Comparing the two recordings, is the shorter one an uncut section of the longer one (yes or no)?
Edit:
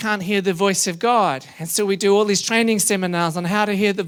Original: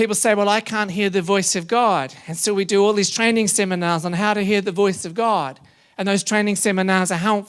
yes